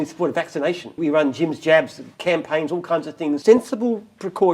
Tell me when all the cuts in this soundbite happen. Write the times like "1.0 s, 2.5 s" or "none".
1.0 s, 3.4 s